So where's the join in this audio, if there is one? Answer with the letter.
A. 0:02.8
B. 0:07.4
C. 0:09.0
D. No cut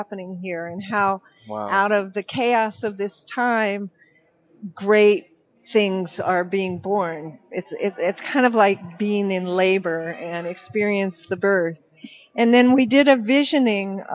D